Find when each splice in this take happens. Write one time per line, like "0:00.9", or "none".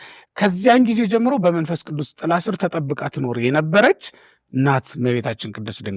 none